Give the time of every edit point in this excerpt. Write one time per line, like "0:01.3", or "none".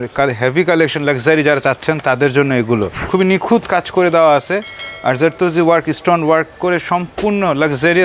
0:02.9